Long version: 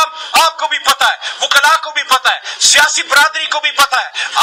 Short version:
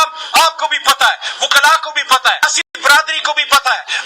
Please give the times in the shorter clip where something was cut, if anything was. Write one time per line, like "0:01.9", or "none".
0:02.7